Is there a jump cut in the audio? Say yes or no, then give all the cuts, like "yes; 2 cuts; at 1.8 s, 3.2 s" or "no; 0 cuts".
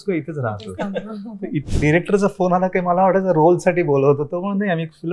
yes; 1 cut; at 1.7 s